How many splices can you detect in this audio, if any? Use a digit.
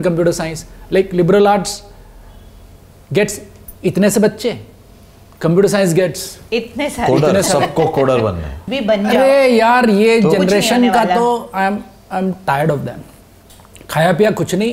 1